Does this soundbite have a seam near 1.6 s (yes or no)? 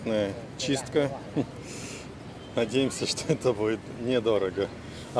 no